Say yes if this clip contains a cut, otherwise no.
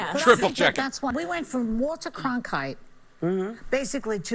yes